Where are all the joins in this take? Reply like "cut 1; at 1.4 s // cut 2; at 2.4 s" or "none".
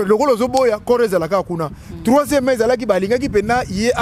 none